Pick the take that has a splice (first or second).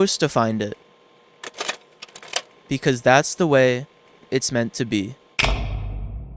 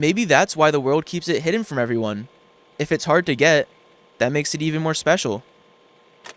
first